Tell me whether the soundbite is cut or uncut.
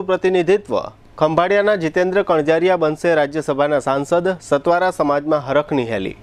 uncut